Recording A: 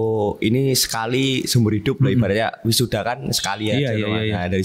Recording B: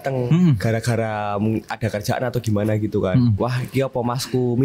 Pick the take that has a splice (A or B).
B